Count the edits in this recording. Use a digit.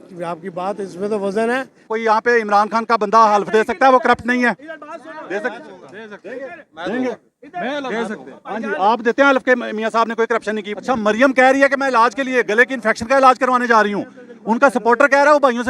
2